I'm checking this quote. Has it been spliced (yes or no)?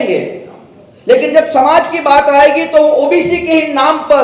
no